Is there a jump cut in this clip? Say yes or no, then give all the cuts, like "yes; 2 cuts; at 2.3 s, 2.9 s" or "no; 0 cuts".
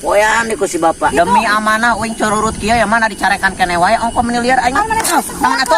yes; 1 cut; at 1.1 s